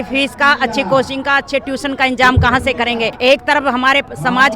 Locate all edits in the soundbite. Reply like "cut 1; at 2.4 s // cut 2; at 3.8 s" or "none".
cut 1; at 3.1 s